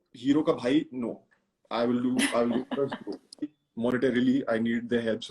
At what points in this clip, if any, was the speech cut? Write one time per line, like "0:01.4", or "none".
0:03.4

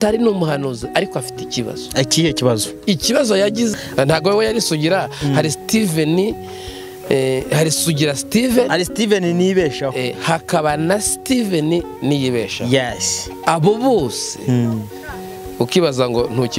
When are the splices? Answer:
0:03.8

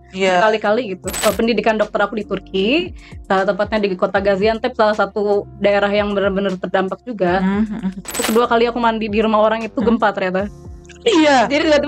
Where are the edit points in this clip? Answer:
0:01.1
0:08.2

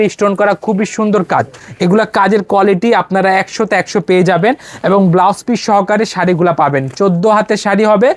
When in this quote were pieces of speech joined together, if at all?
none

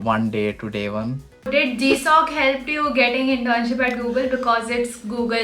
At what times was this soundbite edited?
0:01.5

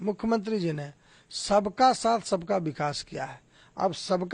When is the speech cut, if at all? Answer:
none

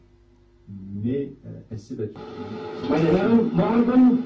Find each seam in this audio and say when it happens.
0:01.9

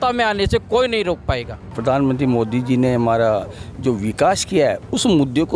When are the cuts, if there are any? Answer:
0:01.8

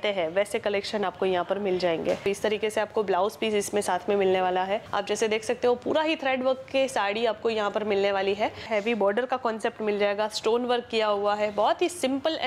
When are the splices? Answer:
0:02.3
0:04.9
0:08.7

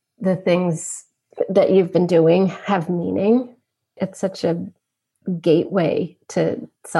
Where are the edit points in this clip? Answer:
0:01.2
0:04.0

